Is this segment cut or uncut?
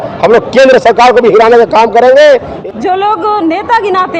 cut